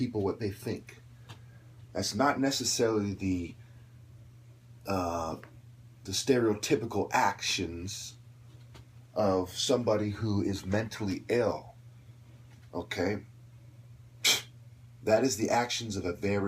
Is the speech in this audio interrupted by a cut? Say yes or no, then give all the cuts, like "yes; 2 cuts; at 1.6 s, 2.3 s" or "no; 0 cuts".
yes; 1 cut; at 7.7 s